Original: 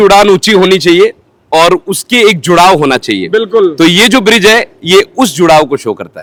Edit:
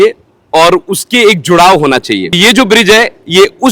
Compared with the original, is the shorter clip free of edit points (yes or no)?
no